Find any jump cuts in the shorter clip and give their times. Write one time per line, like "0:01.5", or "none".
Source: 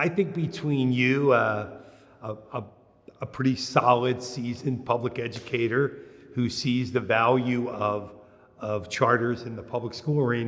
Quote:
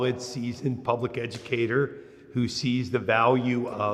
none

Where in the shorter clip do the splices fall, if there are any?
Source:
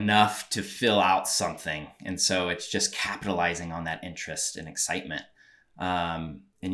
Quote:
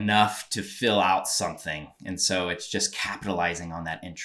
none

